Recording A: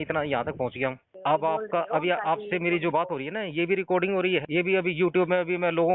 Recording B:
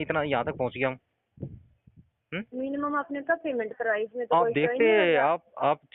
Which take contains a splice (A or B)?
A